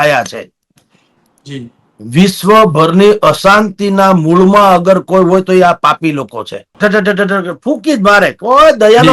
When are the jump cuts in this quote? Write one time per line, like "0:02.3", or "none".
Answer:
0:06.7